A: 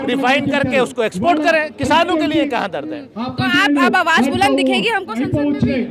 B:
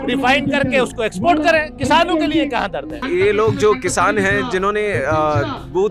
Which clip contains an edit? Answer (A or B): B